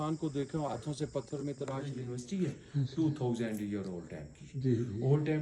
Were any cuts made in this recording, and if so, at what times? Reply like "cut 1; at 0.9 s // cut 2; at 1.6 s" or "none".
cut 1; at 1.8 s

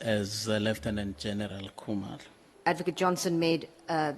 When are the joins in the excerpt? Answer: cut 1; at 2.5 s

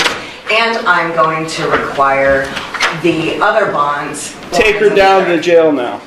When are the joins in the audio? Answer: cut 1; at 4.5 s

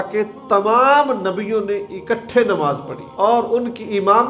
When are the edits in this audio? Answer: cut 1; at 3.0 s

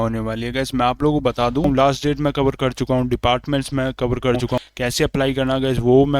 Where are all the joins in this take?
cut 1; at 1.6 s // cut 2; at 4.6 s

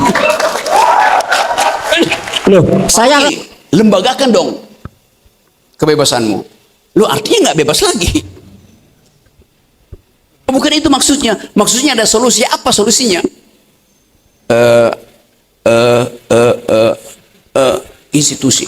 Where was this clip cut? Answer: cut 1; at 3.3 s

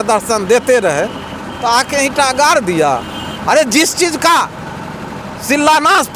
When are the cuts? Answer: none

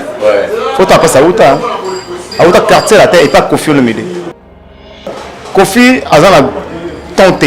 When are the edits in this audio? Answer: cut 1; at 4.8 s

